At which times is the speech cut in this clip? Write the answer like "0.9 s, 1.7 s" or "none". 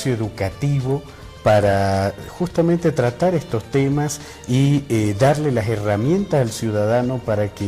4.7 s